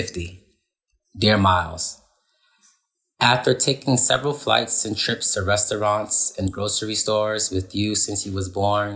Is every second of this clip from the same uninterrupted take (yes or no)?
yes